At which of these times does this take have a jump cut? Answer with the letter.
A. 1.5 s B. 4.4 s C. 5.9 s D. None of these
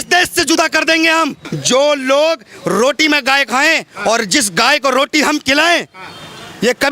A